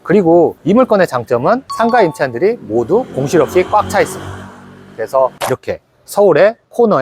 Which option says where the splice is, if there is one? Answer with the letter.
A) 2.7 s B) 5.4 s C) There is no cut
B